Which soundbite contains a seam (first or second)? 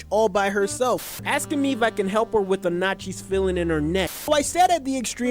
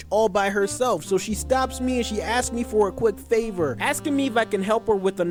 first